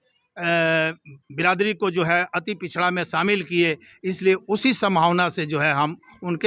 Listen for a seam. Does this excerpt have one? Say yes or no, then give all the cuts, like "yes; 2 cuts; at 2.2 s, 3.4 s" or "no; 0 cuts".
no; 0 cuts